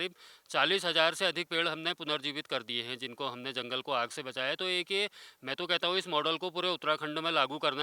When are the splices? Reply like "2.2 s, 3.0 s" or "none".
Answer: none